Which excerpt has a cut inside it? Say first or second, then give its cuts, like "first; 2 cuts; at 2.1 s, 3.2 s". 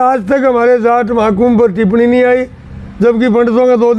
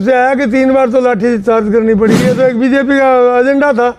second; 1 cut; at 2.2 s